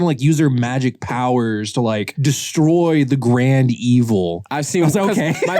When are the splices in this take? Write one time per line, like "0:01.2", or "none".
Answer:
0:02.1
0:04.4